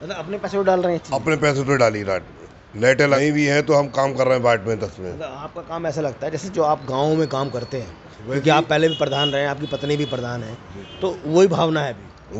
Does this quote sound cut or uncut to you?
cut